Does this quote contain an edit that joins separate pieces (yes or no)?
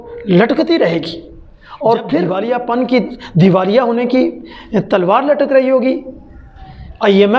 yes